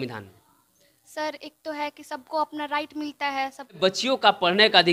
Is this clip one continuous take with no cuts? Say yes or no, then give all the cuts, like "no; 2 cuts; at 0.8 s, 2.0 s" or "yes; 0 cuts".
no; 1 cut; at 3.8 s